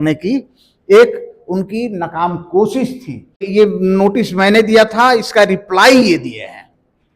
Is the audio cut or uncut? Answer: cut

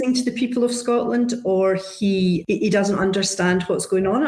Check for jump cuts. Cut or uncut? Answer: cut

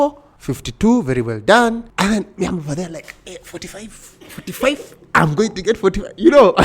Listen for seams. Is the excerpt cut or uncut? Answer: uncut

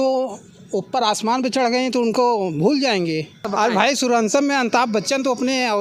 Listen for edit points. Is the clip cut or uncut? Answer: cut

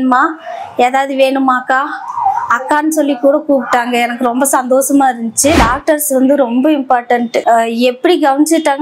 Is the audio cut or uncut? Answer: cut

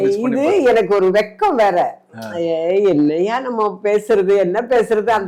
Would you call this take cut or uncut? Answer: uncut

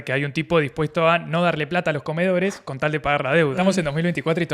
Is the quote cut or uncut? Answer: cut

